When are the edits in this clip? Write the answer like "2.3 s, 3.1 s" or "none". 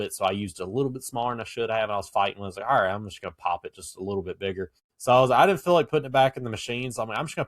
4.8 s